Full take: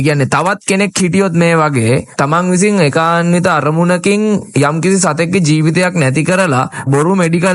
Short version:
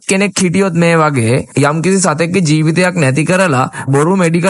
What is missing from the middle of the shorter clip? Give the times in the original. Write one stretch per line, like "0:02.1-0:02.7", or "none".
0:02.1-0:04.5